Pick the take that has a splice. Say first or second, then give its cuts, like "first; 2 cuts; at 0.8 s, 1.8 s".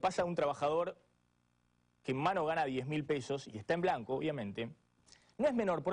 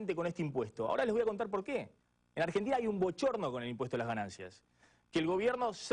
second; 1 cut; at 3.2 s